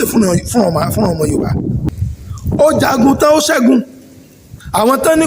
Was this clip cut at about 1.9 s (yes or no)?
yes